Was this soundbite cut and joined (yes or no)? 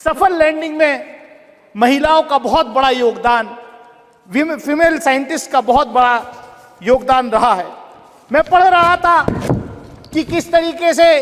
no